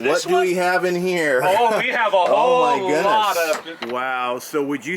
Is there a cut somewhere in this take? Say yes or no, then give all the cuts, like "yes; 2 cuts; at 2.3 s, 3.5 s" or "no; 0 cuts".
yes; 1 cut; at 3.7 s